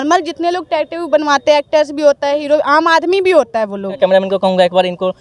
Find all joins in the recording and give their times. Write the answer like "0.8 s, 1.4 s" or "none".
4.0 s